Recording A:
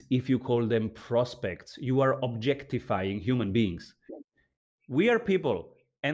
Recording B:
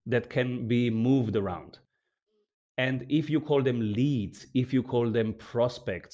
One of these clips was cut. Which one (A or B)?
A